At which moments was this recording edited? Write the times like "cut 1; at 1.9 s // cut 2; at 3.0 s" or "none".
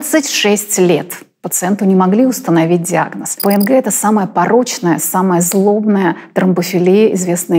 cut 1; at 3.3 s